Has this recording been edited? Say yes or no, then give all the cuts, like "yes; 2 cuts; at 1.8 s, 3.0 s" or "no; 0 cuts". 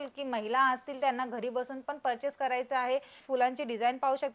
yes; 1 cut; at 3.1 s